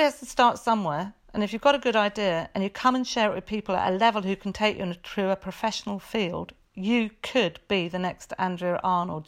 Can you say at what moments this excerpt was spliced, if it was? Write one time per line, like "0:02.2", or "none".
none